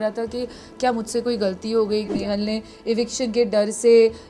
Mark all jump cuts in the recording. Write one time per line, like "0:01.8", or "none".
0:02.1